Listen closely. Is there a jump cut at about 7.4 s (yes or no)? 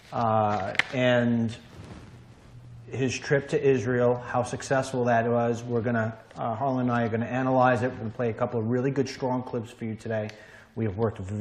no